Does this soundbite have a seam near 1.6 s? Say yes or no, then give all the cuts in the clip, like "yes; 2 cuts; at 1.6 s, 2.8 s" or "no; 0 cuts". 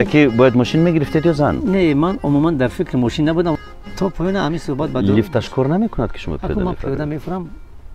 no; 1 cut; at 3.5 s